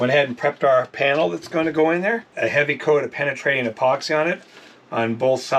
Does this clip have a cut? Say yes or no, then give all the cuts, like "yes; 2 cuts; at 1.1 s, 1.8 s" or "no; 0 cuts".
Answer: yes; 1 cut; at 2.3 s